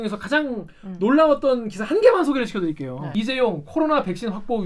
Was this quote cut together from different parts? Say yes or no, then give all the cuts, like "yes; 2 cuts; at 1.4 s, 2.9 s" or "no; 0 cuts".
yes; 1 cut; at 3.0 s